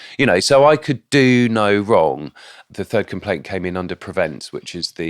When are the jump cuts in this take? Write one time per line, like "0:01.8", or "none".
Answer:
0:02.6